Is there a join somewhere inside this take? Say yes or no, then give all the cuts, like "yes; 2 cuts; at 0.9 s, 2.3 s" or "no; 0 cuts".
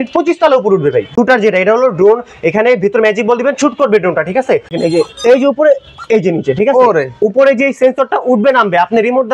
yes; 2 cuts; at 1.1 s, 4.8 s